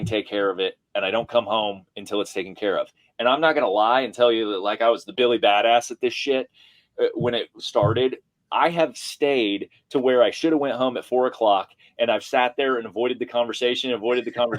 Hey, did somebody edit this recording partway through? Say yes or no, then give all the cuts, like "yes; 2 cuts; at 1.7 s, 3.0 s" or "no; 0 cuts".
yes; 1 cut; at 5.1 s